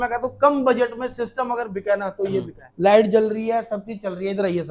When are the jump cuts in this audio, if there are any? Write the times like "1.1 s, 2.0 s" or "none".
2.6 s